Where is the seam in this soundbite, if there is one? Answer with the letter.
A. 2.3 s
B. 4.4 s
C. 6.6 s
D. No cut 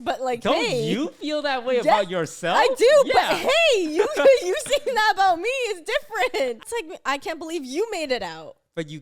C